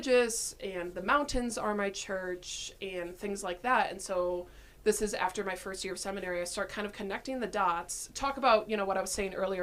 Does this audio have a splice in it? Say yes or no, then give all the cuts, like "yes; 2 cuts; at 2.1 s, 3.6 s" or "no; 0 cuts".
no; 0 cuts